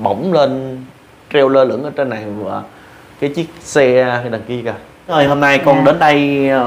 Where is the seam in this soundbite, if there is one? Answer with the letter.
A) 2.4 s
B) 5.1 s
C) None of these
B